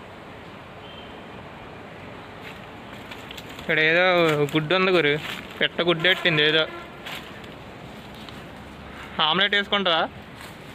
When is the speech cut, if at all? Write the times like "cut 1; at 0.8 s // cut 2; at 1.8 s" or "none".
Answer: none